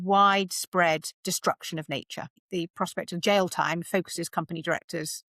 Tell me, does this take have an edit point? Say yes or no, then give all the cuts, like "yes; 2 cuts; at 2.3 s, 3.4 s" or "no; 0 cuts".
yes; 2 cuts; at 1.1 s, 2.4 s